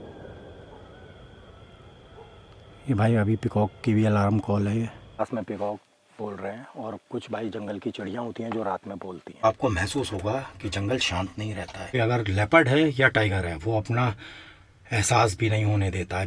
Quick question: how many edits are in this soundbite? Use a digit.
3